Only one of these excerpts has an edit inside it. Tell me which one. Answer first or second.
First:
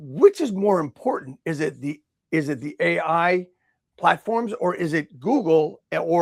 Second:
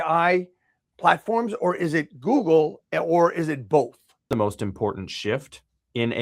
second